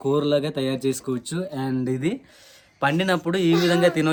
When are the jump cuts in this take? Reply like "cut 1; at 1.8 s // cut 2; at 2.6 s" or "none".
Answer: none